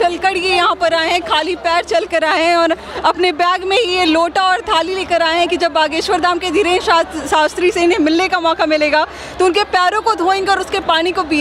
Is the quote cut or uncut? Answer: uncut